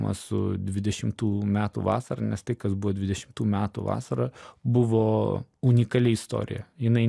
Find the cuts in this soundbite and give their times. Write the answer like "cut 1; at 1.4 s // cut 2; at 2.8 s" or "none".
cut 1; at 4.5 s // cut 2; at 5.5 s